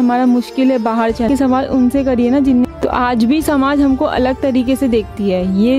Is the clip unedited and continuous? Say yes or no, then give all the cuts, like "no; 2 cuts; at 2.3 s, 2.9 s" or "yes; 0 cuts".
no; 2 cuts; at 1.3 s, 2.7 s